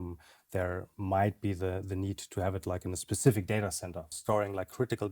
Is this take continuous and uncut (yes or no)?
no